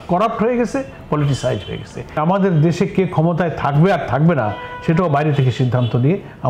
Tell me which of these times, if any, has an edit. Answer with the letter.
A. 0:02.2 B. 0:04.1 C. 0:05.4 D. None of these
A